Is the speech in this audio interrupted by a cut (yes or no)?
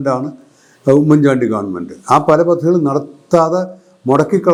no